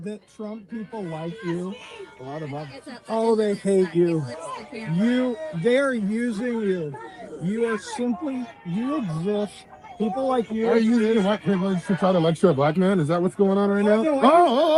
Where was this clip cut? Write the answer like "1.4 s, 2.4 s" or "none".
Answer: none